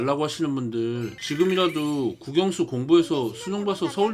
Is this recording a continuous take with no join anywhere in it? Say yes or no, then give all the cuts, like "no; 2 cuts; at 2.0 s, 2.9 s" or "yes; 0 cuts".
yes; 0 cuts